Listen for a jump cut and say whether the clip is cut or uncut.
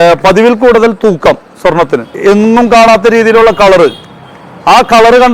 cut